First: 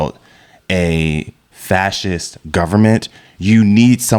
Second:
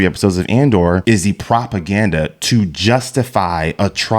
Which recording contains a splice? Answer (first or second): second